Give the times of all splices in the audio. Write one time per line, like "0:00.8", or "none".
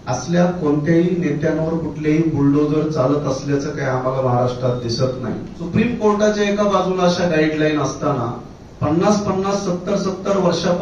0:05.5